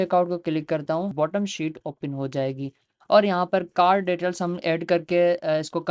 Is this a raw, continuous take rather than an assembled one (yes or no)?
no